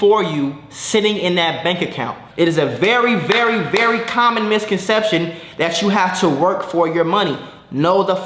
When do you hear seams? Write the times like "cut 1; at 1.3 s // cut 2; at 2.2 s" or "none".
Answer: cut 1; at 2.2 s